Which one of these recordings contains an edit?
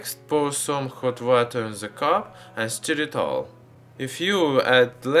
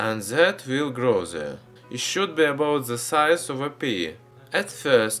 first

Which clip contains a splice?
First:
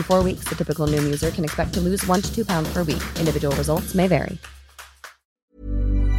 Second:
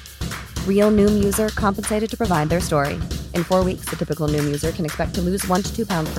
first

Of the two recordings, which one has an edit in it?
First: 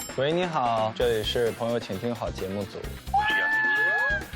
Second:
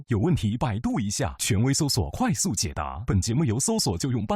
first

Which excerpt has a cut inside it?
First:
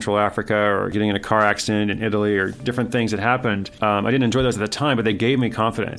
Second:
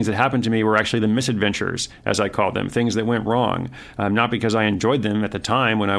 first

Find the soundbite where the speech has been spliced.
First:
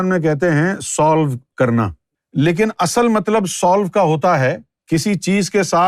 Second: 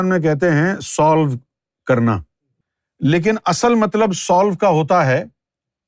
first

